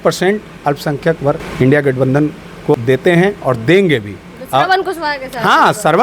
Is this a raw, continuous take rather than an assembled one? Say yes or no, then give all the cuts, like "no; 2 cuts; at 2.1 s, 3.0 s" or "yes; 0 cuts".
no; 2 cuts; at 1.5 s, 2.7 s